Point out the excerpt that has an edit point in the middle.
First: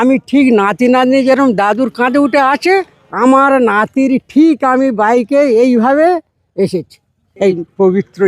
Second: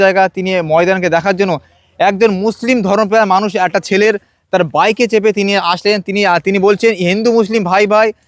first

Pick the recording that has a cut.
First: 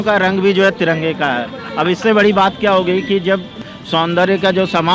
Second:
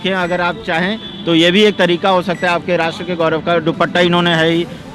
first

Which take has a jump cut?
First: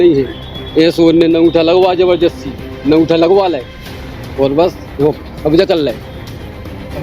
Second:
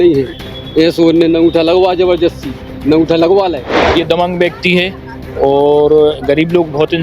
second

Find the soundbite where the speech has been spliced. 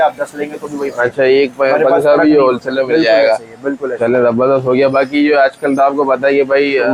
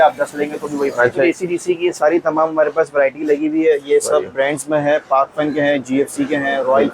second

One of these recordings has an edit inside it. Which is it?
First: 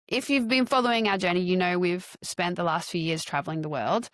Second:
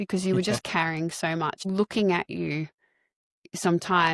second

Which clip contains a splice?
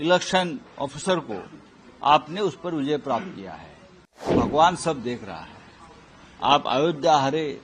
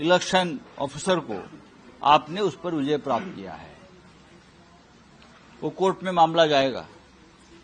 first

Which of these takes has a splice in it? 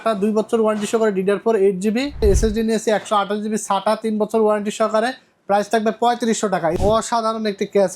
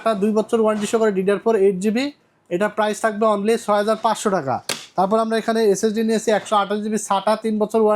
first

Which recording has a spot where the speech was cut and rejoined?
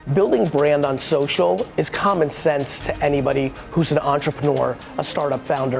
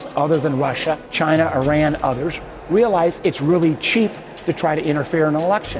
second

